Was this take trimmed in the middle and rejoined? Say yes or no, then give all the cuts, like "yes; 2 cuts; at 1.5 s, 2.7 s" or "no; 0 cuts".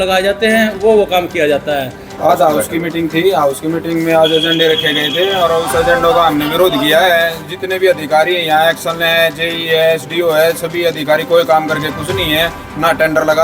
yes; 1 cut; at 2.2 s